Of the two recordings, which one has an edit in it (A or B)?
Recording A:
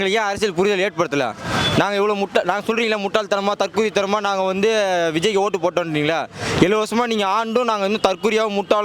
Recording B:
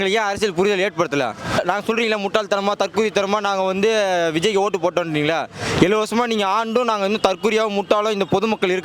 B